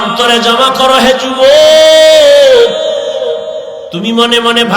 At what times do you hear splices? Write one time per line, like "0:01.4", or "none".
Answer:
0:03.8